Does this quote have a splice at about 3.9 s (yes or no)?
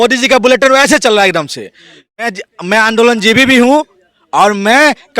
no